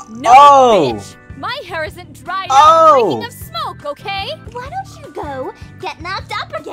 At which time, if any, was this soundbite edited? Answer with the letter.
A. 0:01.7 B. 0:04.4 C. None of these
B